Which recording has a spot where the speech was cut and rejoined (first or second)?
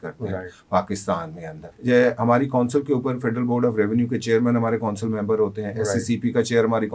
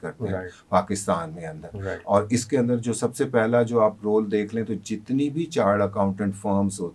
first